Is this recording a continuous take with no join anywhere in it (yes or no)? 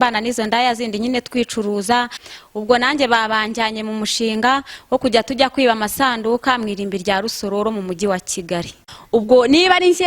no